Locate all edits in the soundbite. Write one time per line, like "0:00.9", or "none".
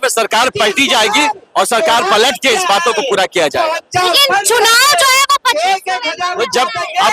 none